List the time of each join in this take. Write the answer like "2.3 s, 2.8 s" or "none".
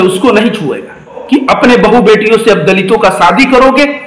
1.2 s